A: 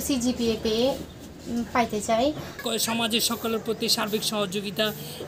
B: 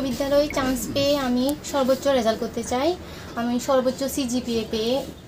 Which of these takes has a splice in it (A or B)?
A